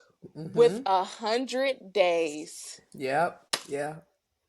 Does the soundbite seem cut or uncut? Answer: cut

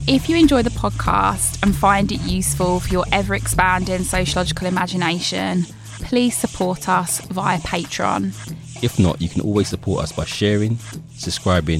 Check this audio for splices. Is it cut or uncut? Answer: uncut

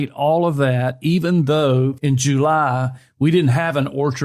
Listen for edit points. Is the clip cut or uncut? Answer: cut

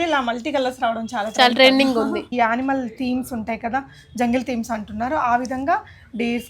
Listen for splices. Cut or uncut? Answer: cut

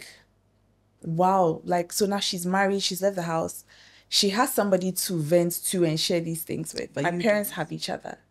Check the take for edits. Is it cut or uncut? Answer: uncut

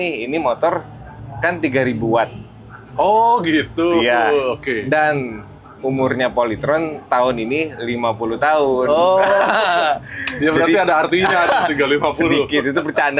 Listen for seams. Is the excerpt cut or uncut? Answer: uncut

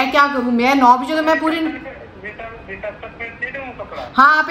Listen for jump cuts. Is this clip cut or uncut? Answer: uncut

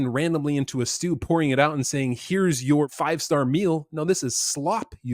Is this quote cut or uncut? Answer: cut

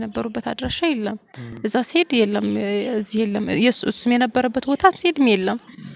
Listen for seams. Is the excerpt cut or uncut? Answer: uncut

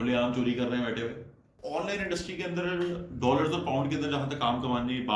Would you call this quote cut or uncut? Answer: cut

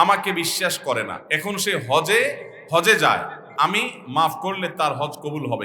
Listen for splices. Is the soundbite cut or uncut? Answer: cut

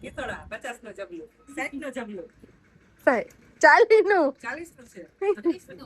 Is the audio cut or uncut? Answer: uncut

